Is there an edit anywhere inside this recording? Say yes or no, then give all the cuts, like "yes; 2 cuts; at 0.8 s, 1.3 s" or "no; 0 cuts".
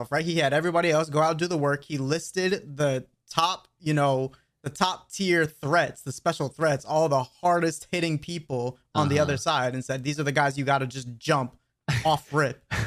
no; 0 cuts